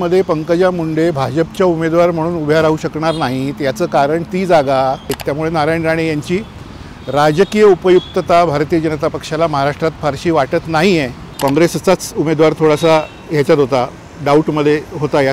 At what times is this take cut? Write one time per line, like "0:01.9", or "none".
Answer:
0:05.2
0:11.2